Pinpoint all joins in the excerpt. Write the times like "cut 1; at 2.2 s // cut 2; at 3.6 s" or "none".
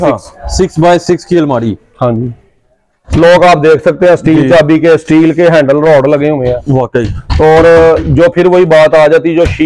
none